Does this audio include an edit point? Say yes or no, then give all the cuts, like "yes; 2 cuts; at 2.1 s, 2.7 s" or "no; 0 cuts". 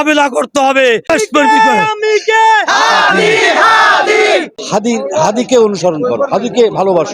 yes; 2 cuts; at 1.1 s, 4.5 s